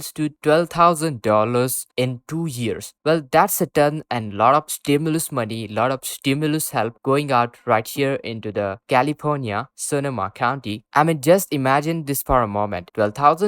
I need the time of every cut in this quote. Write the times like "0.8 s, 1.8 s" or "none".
none